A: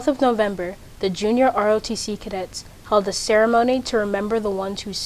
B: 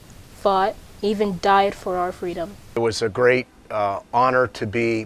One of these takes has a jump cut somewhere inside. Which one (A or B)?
B